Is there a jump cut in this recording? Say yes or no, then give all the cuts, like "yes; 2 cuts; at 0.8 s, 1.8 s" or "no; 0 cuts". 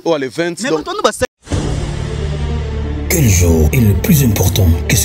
yes; 1 cut; at 1.3 s